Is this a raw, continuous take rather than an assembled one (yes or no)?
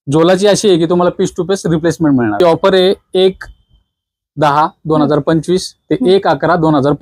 no